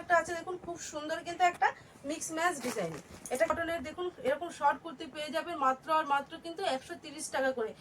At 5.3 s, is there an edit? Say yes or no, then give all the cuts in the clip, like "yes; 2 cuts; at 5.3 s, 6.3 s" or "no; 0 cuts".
no; 1 cut; at 3.5 s